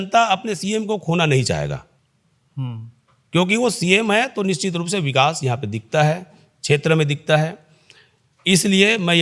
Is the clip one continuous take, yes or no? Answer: yes